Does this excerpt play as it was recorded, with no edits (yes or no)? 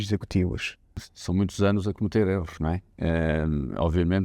no